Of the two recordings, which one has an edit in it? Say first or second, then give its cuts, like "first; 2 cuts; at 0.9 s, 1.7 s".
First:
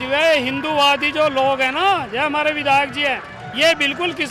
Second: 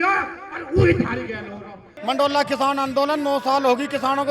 second; 1 cut; at 1.9 s